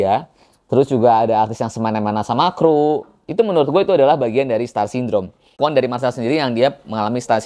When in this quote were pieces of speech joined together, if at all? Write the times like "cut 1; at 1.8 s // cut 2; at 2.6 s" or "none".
cut 1; at 5.6 s